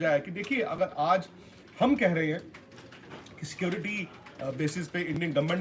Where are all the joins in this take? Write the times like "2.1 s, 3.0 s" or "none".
none